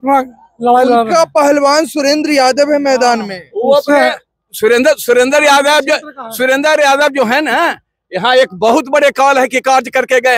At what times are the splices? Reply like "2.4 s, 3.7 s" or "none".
none